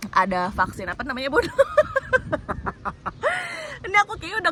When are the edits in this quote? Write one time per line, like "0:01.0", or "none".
none